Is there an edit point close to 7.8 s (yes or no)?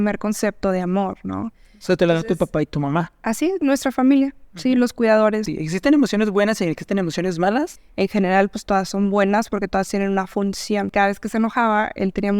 yes